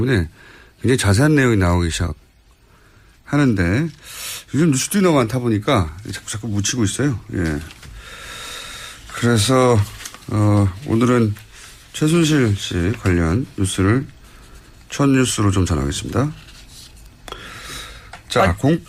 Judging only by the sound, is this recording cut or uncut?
uncut